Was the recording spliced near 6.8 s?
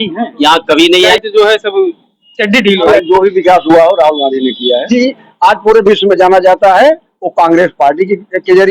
no; 3 cuts; at 1.1 s, 2.9 s, 4.9 s

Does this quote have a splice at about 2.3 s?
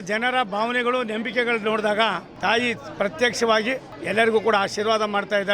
yes; 2 cuts; at 2.3 s, 3.9 s

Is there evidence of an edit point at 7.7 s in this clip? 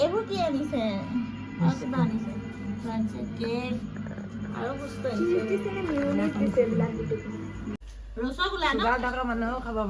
yes; 1 cut; at 7.7 s

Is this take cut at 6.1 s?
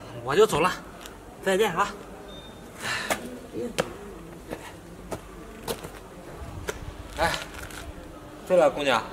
yes; 1 cut; at 6.1 s

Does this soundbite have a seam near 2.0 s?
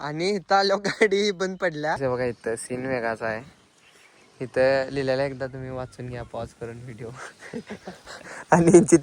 yes; 1 cut; at 2.0 s

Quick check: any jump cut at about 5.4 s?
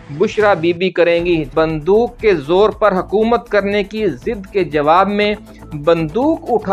no; 1 cut; at 1.5 s

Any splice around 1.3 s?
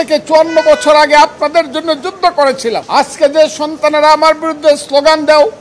no; 1 cut; at 2.8 s

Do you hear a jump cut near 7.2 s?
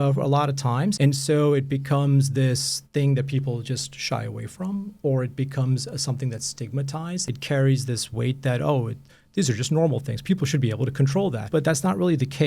yes; 3 cuts; at 1.0 s, 7.2 s, 11.4 s

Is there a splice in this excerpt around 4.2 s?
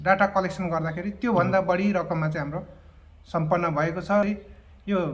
yes; 1 cut; at 4.2 s

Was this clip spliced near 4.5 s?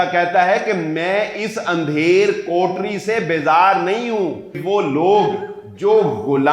yes; 1 cut; at 4.5 s

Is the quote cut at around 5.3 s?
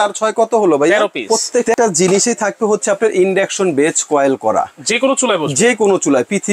no; 1 cut; at 1.4 s

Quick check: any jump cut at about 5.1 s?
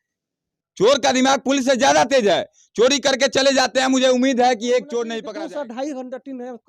yes; 1 cut; at 5.1 s

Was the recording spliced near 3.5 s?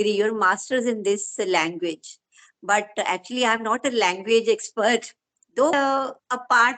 no; 1 cut; at 5.7 s

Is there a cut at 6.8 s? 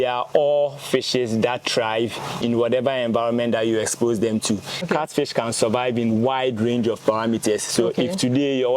no; 1 cut; at 4.8 s

